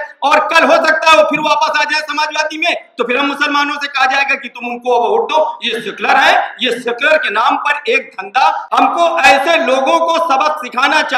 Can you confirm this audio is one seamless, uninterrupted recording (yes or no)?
no